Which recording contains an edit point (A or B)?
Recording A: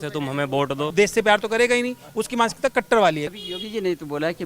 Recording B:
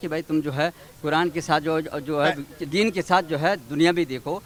A